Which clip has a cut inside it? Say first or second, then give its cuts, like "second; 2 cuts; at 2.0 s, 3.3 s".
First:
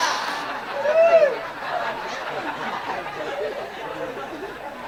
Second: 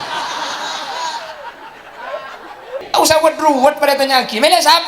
second; 1 cut; at 2.8 s